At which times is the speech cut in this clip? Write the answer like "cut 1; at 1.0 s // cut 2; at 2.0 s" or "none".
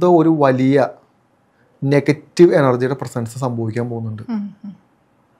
none

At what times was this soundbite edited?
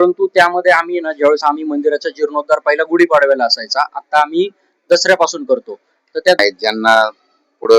cut 1; at 6.4 s

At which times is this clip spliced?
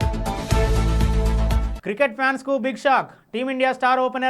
cut 1; at 1.7 s

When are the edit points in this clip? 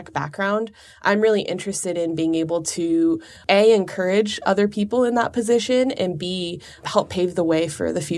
cut 1; at 3.3 s // cut 2; at 6.8 s

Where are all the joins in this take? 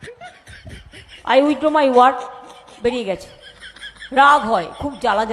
cut 1; at 1.3 s

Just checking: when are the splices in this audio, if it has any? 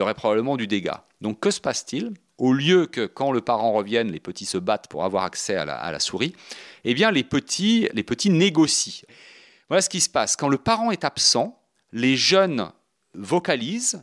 cut 1; at 8.0 s // cut 2; at 9.2 s

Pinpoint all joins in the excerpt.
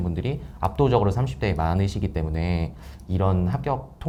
none

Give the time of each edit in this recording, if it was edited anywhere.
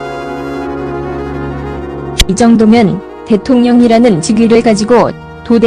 cut 1; at 1.2 s

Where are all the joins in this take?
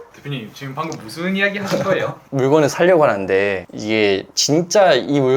cut 1; at 2.2 s

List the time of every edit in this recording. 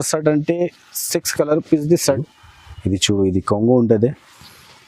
cut 1; at 2.2 s

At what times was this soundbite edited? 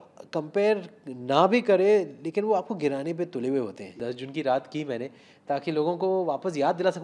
cut 1; at 4.0 s

